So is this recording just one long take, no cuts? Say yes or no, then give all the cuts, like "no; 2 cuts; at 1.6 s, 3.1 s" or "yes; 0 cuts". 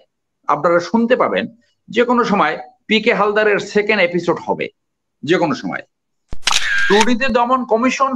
no; 1 cut; at 6.4 s